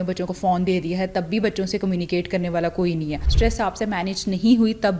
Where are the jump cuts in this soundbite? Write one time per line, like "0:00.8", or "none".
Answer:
0:03.2